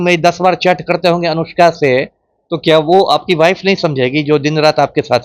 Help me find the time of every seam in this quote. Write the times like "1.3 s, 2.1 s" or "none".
none